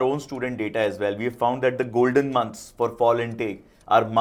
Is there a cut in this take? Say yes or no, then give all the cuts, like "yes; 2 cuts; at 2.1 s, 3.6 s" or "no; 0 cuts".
no; 0 cuts